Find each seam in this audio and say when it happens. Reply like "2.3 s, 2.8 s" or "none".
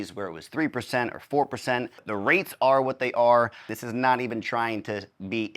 2.0 s, 3.8 s